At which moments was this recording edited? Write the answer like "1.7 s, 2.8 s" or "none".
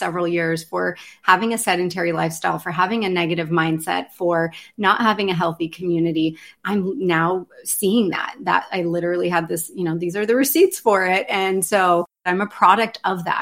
12.2 s